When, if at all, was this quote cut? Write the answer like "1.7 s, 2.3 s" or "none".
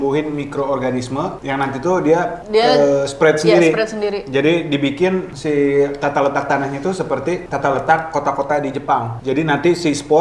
none

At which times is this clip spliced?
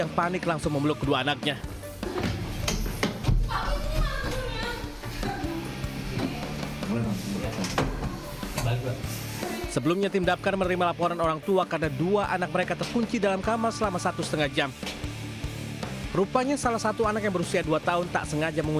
none

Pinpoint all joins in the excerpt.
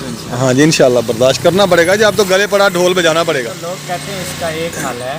none

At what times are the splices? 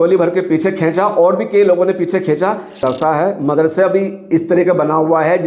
2.8 s

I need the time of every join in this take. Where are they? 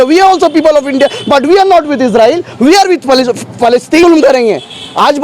4.0 s

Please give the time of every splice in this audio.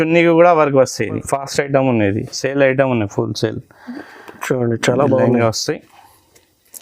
1.2 s

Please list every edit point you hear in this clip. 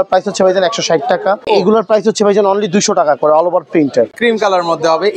1.4 s, 4.2 s

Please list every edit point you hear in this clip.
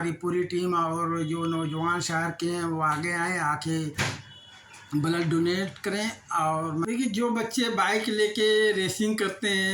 6.8 s

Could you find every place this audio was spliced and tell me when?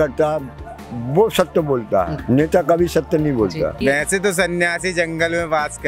3.8 s

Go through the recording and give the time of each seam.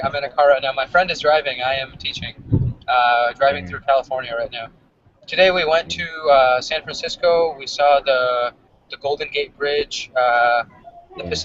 2.8 s

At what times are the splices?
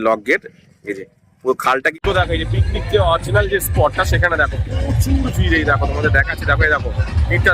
1.9 s

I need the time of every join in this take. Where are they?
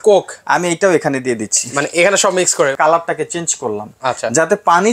2.7 s

